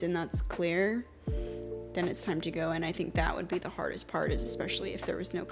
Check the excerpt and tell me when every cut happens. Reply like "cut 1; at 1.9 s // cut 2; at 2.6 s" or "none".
none